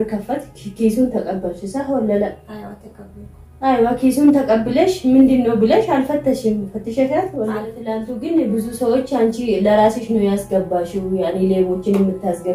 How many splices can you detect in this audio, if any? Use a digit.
1